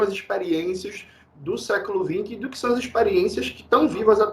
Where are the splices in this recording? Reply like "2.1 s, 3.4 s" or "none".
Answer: none